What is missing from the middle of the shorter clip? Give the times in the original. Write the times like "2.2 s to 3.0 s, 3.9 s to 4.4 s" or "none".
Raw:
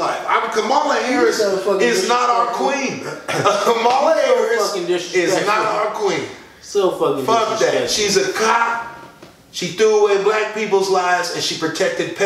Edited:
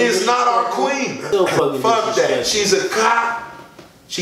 3.0 s to 6.6 s